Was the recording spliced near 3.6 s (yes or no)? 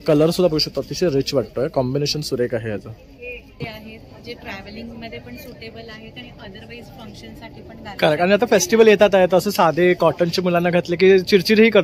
yes